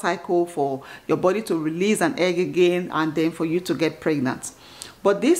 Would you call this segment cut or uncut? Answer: uncut